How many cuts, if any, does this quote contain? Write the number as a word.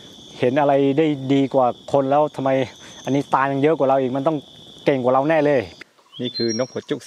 one